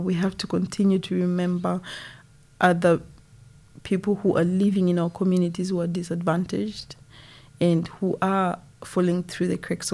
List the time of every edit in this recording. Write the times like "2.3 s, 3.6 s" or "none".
none

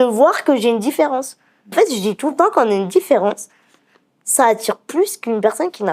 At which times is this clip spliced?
1.7 s

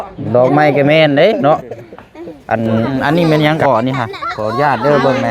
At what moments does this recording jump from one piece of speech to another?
2.9 s

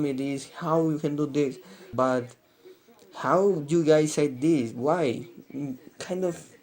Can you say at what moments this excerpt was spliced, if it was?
1.9 s

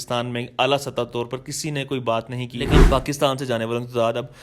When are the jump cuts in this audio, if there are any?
2.7 s

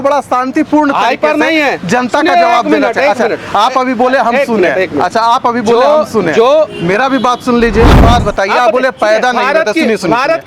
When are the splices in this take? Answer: 7.9 s

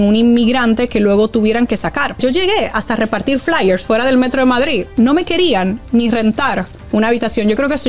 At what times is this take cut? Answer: 2.2 s, 4.9 s

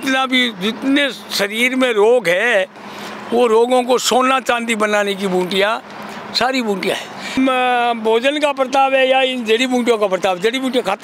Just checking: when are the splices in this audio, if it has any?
7.3 s

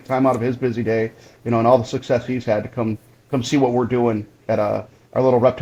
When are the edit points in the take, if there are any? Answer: none

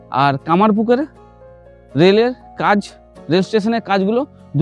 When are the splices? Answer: none

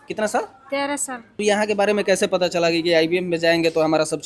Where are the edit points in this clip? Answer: 1.4 s

